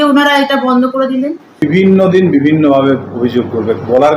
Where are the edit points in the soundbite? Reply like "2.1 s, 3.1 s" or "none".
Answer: 1.6 s